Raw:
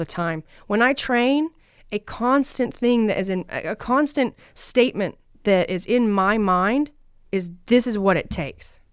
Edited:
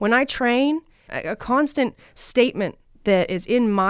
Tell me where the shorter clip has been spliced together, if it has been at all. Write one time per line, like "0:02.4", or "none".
0:01.1